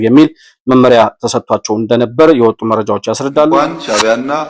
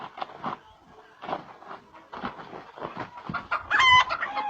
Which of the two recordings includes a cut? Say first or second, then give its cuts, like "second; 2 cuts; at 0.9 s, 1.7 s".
first; 1 cut; at 3.5 s